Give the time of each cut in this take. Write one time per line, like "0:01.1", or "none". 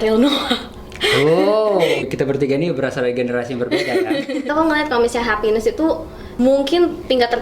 0:02.0
0:04.5
0:06.2